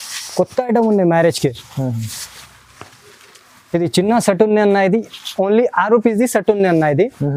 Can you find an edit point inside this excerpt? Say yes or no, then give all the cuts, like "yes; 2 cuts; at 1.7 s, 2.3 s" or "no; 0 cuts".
no; 0 cuts